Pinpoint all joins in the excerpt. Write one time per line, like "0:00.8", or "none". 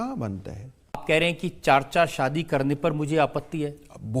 0:01.0